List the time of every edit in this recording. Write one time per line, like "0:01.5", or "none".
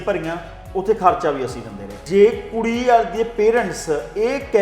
0:02.0